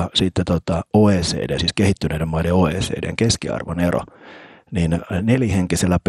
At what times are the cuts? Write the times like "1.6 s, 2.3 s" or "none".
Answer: none